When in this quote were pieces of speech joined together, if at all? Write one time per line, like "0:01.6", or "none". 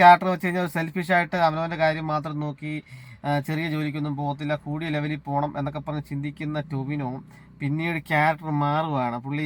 none